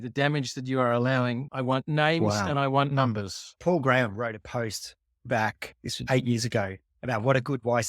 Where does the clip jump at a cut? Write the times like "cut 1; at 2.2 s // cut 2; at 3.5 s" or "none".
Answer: cut 1; at 1.5 s // cut 2; at 3.4 s